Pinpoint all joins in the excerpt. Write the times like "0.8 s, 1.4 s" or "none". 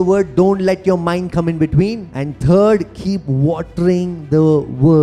2.1 s